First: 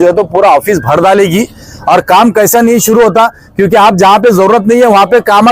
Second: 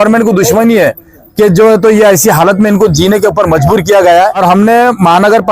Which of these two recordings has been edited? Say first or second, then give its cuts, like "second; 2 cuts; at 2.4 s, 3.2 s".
second; 1 cut; at 4.4 s